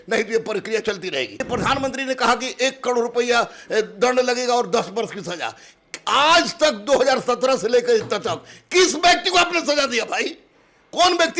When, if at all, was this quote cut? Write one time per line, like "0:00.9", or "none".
0:01.5

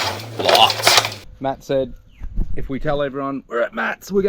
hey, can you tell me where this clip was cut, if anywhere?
0:01.2

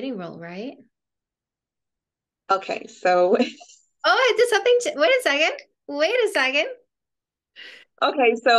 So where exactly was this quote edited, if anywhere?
none

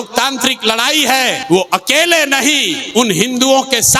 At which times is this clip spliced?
0:01.4
0:02.8

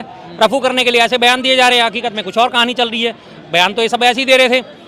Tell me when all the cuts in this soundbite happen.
none

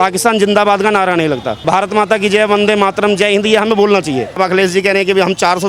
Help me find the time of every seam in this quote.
0:01.6
0:04.4

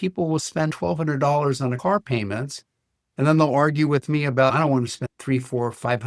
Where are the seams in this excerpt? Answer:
0:01.8

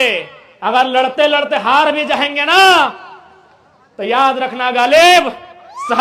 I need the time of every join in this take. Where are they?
none

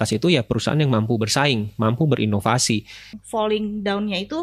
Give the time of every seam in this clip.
0:03.2

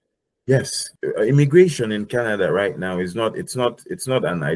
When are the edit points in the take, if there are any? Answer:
0:01.0

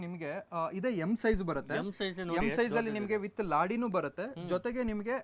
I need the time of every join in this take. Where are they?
none

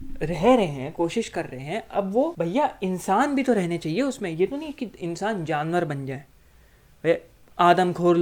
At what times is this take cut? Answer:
0:02.3

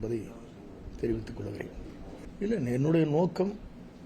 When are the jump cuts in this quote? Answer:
none

